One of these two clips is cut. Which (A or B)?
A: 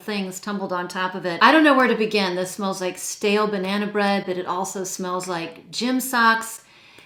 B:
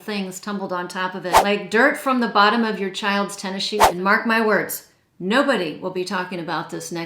B